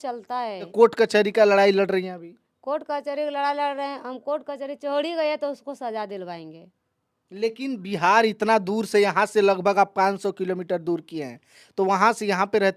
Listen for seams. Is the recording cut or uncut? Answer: uncut